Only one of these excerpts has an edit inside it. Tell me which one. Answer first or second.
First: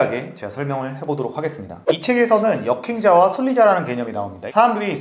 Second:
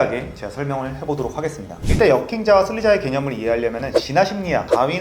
second